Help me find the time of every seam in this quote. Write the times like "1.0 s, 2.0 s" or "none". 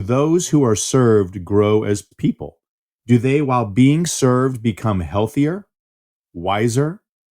2.1 s